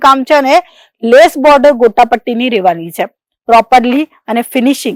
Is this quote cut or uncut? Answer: uncut